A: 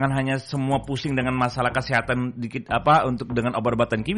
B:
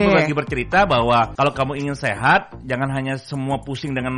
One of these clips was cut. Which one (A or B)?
B